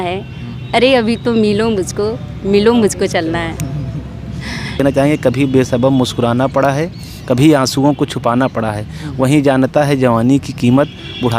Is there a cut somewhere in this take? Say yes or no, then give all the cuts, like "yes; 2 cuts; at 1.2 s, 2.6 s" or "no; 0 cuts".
yes; 1 cut; at 4.8 s